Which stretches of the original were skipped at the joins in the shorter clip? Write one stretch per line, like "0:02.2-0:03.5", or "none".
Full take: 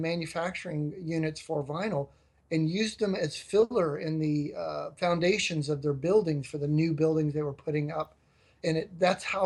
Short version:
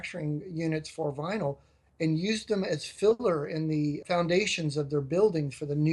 0:04.5-0:04.9